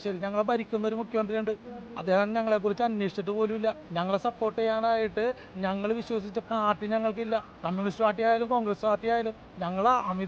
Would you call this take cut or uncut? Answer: cut